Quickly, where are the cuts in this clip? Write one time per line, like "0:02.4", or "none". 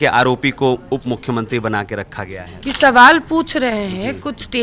0:02.5